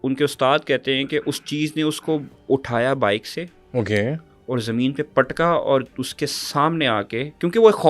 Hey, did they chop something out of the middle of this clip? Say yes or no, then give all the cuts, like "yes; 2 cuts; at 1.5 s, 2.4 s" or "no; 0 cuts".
no; 0 cuts